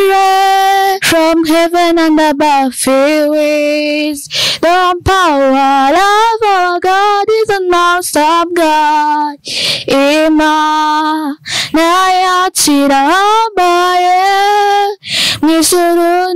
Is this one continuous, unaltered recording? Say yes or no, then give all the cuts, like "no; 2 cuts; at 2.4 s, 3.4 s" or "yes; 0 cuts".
no; 1 cut; at 1.0 s